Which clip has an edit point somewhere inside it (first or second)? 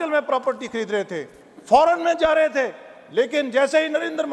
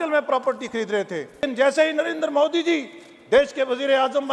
second